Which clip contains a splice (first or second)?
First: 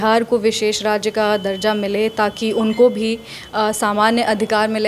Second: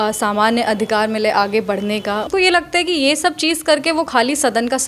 second